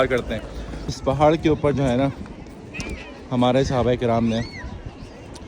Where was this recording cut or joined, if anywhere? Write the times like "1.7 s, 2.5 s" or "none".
0.9 s